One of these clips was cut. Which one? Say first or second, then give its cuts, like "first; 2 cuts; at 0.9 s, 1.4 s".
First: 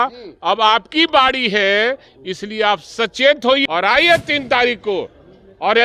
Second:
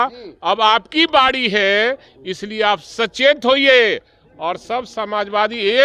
first; 1 cut; at 3.6 s